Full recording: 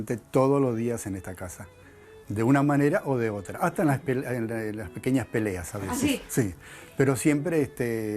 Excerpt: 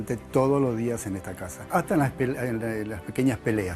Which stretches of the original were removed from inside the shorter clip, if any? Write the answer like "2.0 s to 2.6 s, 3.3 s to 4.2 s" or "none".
1.6 s to 3.5 s